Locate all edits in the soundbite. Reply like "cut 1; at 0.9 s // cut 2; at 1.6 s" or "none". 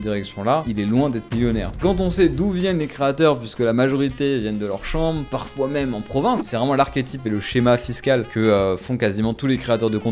cut 1; at 1.8 s // cut 2; at 6.4 s